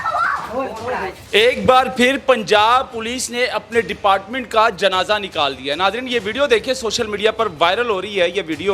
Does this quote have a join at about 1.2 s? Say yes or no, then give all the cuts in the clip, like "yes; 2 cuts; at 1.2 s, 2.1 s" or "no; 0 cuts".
yes; 1 cut; at 1.2 s